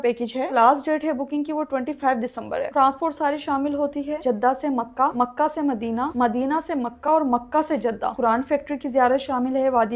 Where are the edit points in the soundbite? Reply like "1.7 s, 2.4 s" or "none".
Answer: 2.7 s, 4.2 s, 8.2 s